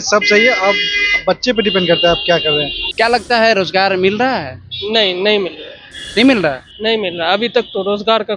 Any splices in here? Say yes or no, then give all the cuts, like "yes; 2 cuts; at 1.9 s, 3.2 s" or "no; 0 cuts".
yes; 1 cut; at 2.8 s